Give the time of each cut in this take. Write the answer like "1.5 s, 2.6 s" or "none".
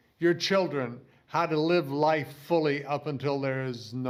none